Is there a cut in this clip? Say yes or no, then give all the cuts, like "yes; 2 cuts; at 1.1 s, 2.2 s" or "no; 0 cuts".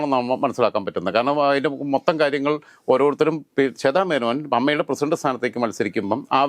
no; 0 cuts